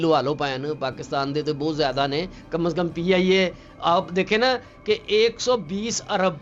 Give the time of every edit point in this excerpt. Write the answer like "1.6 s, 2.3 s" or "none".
none